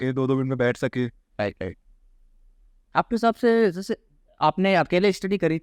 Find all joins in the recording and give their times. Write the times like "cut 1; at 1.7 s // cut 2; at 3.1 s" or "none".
none